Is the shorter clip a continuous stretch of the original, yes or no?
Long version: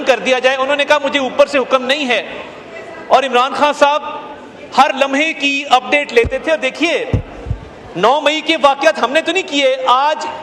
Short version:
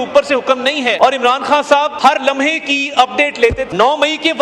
no